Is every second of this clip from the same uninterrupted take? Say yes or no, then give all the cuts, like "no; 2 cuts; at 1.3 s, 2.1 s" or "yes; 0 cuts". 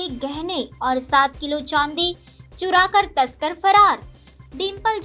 yes; 0 cuts